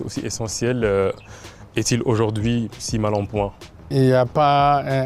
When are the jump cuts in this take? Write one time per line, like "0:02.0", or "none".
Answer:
0:03.8